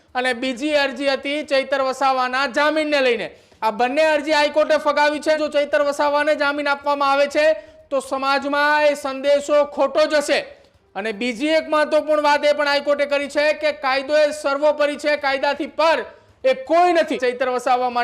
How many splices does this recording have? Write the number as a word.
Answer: two